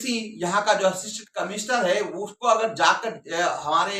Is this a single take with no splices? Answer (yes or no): yes